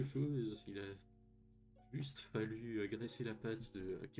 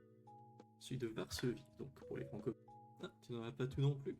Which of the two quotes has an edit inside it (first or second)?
second